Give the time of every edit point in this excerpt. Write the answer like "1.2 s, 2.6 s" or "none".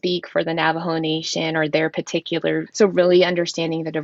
2.7 s